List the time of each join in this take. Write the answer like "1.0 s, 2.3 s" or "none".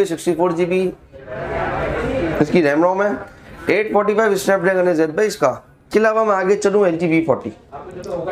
5.7 s